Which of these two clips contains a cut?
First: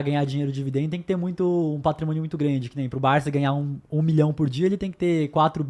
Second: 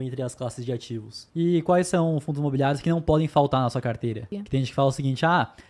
second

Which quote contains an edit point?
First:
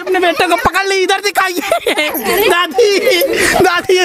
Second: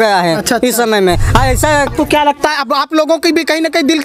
second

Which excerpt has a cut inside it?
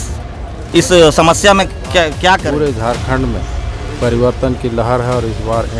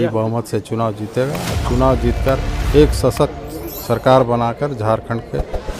first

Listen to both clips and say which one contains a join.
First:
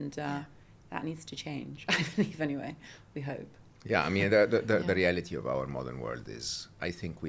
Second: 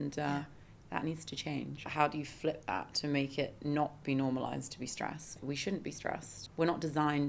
second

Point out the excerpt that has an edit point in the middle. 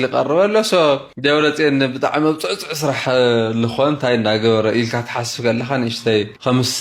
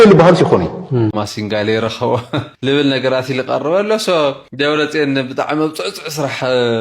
second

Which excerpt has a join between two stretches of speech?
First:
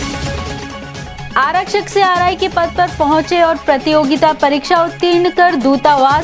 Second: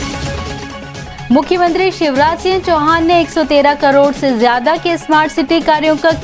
second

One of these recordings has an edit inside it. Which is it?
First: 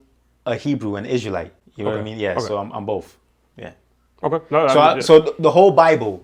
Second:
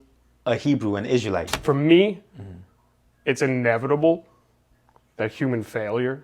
second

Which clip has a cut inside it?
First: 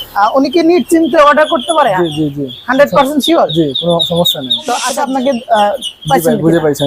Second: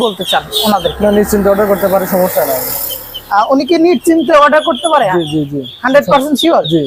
first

